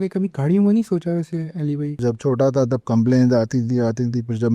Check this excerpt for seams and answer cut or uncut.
cut